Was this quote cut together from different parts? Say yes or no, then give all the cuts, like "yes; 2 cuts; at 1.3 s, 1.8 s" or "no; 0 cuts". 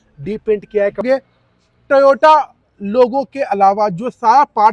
yes; 1 cut; at 1.0 s